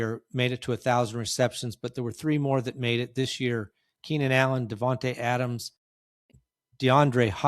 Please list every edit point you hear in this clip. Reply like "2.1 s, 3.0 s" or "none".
6.2 s